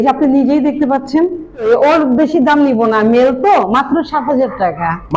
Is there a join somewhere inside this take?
yes; 1 cut; at 1.7 s

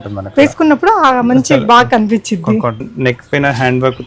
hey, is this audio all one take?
no; 1 cut; at 2.8 s

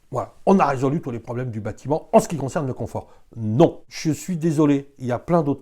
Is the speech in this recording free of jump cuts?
no; 1 cut; at 3.9 s

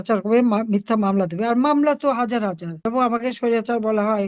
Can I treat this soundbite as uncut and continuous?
no; 1 cut; at 2.8 s

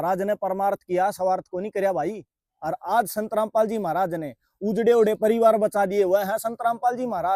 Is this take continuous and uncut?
yes; 0 cuts

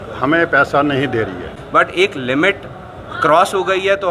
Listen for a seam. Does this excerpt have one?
yes; 1 cut; at 1.5 s

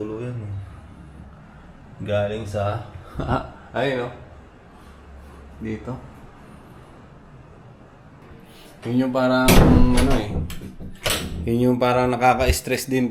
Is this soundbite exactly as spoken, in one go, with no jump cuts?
no; 1 cut; at 8.2 s

